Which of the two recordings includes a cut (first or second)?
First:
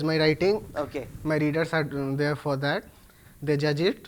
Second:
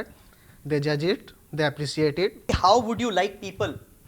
second